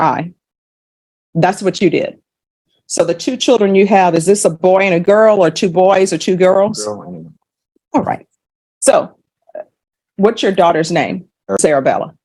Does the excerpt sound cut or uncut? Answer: uncut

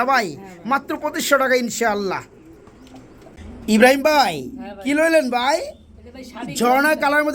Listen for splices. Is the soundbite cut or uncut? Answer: uncut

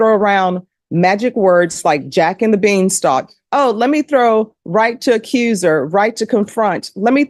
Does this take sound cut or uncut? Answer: uncut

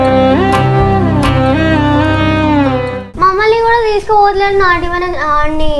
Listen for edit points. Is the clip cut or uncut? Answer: uncut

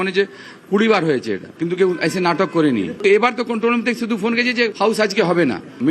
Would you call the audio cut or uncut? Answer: cut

